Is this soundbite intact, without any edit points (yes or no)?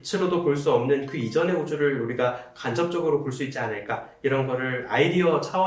yes